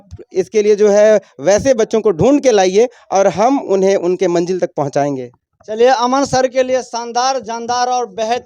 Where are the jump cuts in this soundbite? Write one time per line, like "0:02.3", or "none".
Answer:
none